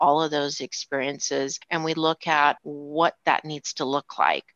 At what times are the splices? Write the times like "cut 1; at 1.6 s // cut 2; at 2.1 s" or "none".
cut 1; at 1.6 s // cut 2; at 2.7 s